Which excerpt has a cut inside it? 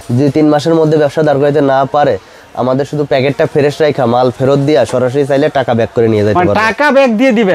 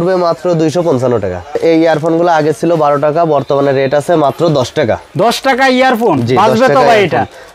second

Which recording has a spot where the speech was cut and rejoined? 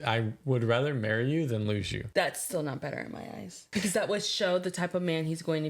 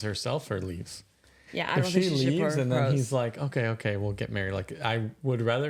first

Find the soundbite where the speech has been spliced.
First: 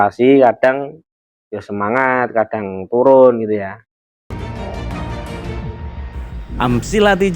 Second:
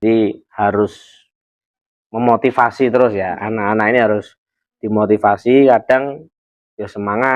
first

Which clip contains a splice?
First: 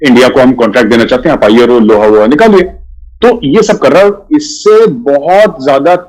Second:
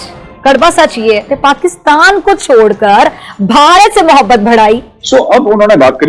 second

